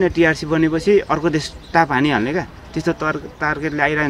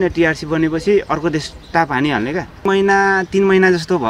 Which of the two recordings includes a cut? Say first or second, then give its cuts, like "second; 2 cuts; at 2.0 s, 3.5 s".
second; 1 cut; at 2.7 s